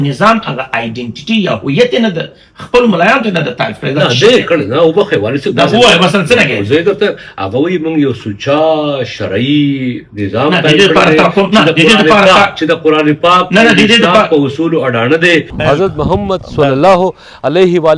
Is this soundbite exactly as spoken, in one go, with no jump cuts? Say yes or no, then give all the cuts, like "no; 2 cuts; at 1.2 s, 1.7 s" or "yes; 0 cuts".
no; 1 cut; at 15.5 s